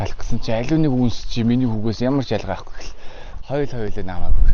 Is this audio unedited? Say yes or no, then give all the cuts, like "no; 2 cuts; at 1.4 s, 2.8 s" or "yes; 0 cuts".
yes; 0 cuts